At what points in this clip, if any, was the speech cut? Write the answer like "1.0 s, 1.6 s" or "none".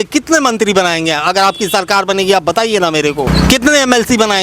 3.3 s